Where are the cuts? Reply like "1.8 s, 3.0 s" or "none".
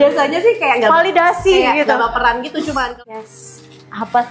2.9 s